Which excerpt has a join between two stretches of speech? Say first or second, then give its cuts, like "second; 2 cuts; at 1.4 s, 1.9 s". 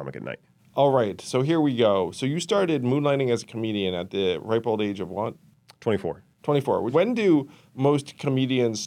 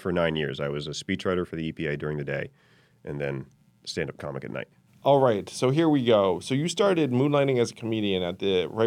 first; 1 cut; at 6.9 s